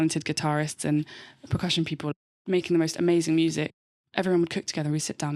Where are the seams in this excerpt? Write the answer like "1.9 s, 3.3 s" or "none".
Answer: 2.1 s, 3.7 s